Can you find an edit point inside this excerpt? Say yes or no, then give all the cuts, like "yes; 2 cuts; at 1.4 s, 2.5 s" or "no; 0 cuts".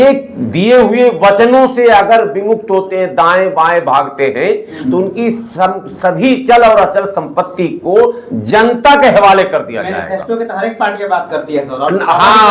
no; 0 cuts